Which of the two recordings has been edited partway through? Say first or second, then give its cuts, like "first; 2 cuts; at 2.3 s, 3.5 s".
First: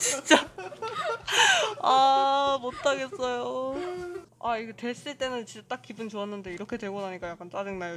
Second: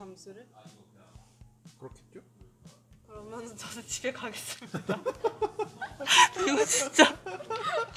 first; 1 cut; at 4.3 s